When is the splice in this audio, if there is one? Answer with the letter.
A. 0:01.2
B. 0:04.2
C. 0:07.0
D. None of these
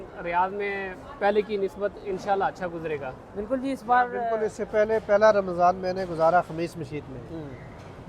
B